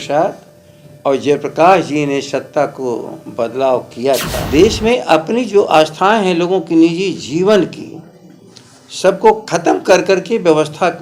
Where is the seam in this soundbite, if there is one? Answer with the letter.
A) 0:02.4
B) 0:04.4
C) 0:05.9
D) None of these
B